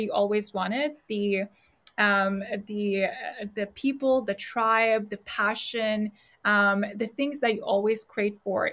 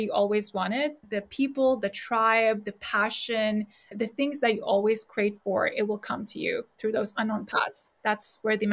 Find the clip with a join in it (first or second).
second